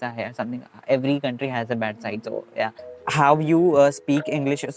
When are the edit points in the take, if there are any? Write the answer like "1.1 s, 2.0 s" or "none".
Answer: 3.0 s